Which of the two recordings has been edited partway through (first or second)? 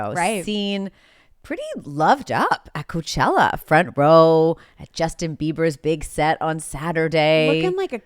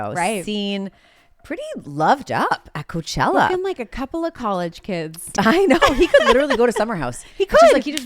second